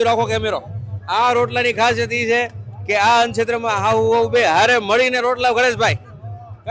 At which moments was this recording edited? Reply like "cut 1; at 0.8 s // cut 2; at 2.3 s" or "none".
none